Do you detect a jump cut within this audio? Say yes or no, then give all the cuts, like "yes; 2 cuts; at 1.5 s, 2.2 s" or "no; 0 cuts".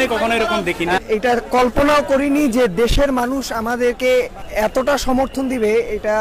yes; 2 cuts; at 1.0 s, 4.4 s